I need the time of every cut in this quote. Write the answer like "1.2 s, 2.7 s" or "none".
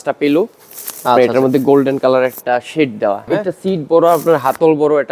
3.2 s